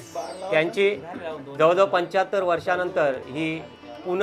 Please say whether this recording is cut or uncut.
uncut